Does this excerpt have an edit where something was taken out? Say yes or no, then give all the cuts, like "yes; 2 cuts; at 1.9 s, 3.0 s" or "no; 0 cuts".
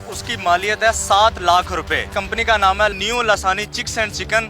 no; 0 cuts